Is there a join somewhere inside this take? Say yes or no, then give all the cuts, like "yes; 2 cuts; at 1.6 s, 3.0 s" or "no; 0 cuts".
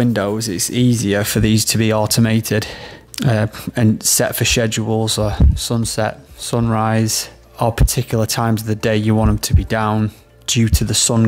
yes; 2 cuts; at 3.0 s, 7.4 s